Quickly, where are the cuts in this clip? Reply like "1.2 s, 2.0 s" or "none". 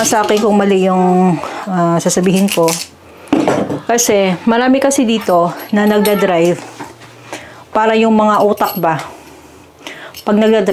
none